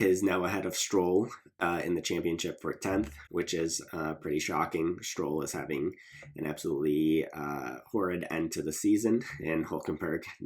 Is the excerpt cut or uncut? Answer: uncut